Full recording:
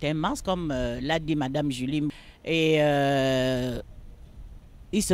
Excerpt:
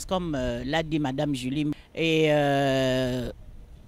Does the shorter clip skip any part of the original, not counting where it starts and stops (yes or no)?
yes